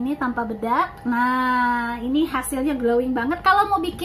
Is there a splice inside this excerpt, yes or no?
no